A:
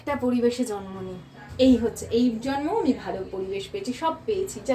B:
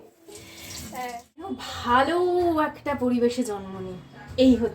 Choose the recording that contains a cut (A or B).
B